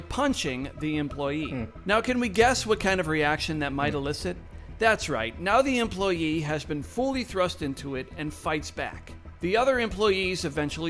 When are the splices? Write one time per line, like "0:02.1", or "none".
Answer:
0:03.4
0:09.1